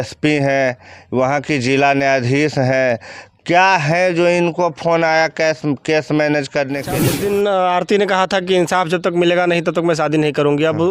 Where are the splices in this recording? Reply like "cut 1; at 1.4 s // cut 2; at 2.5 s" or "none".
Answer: cut 1; at 7.0 s